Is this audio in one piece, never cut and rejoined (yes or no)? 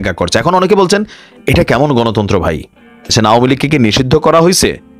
no